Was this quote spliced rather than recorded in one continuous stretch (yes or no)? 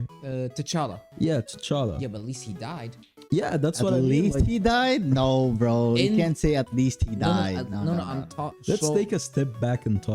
yes